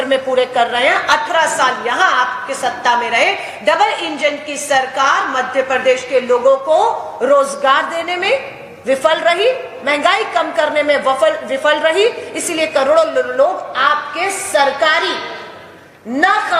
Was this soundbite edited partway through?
no; 0 cuts

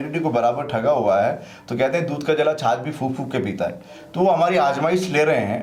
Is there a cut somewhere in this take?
no; 0 cuts

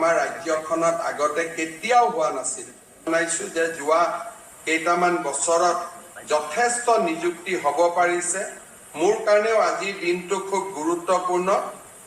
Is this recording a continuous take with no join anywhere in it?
no; 1 cut; at 3.1 s

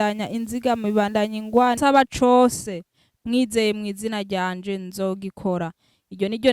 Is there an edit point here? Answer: yes; 1 cut; at 1.8 s

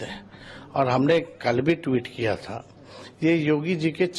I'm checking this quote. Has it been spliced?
no; 0 cuts

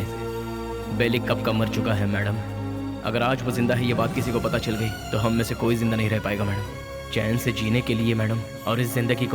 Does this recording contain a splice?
no; 0 cuts

